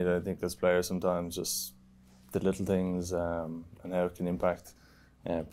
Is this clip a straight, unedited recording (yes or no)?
yes